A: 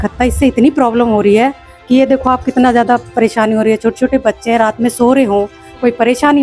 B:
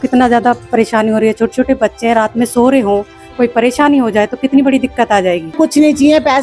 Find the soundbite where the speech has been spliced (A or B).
B